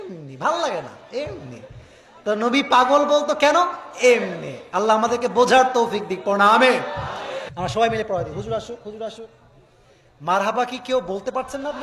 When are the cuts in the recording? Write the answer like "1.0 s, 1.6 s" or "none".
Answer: 7.3 s

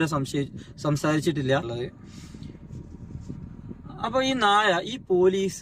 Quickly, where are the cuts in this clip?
1.7 s

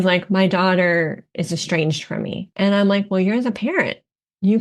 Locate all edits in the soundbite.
2.4 s

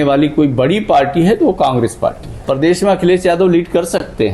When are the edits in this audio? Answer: 2.4 s

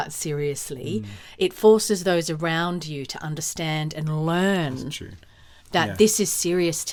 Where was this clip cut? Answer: none

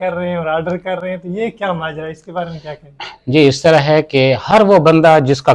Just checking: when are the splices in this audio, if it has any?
none

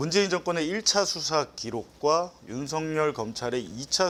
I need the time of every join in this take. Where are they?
none

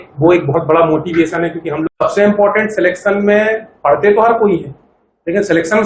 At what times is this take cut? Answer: 1.9 s

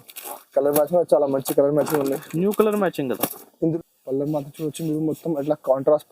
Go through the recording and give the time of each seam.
3.7 s

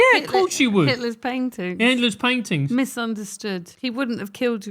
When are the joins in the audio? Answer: 3.7 s

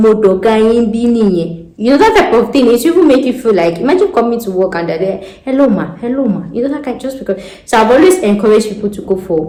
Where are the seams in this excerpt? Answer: none

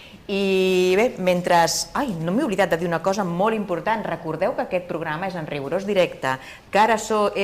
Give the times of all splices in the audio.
1.8 s

